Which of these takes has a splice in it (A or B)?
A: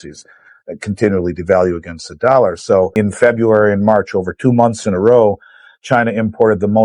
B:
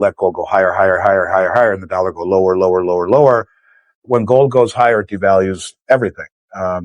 A